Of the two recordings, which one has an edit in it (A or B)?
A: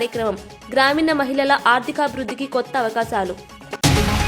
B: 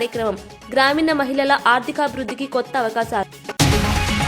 B